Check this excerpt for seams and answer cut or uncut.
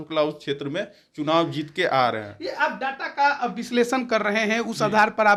uncut